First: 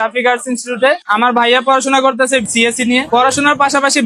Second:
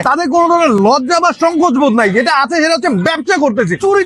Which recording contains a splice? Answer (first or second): first